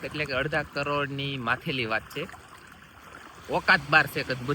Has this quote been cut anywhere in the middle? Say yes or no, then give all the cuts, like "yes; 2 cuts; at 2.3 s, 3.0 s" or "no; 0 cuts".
no; 0 cuts